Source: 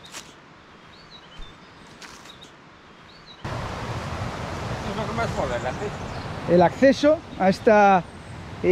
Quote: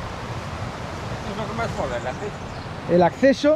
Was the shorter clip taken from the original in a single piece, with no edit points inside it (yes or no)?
yes